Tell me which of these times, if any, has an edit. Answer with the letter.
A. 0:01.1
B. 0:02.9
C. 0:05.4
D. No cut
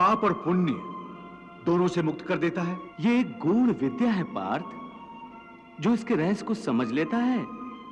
B